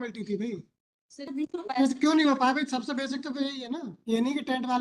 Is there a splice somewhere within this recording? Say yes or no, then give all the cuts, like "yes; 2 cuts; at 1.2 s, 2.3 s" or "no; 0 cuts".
yes; 2 cuts; at 1.3 s, 3.9 s